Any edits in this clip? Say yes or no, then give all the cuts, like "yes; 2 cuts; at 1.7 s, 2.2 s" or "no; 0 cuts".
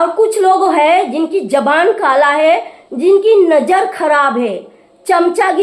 no; 0 cuts